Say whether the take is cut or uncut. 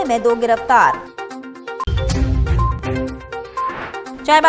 uncut